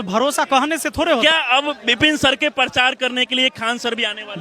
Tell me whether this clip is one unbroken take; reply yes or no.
no